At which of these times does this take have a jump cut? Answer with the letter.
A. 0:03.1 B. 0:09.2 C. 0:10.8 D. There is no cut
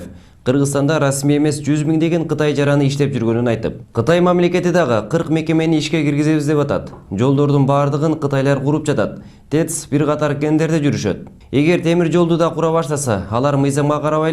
A